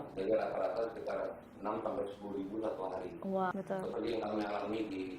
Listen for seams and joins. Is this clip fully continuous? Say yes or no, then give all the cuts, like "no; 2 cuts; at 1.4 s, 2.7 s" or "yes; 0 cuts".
no; 1 cut; at 3.5 s